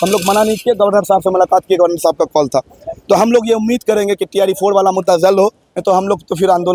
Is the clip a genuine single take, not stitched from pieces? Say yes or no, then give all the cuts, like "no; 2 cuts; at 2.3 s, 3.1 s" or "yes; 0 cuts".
yes; 0 cuts